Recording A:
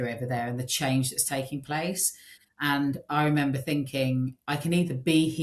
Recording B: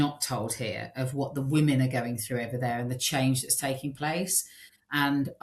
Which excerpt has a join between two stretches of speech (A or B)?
A